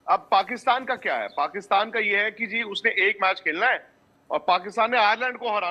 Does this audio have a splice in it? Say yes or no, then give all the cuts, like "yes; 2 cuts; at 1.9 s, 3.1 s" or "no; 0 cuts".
no; 0 cuts